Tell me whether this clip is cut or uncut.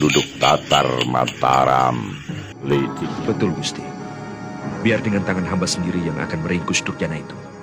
cut